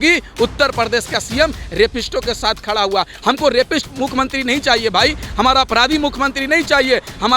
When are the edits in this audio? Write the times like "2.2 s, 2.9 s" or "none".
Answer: none